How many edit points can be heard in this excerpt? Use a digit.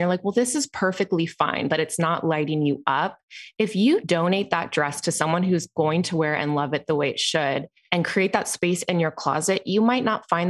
2